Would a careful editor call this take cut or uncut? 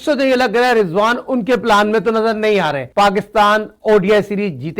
cut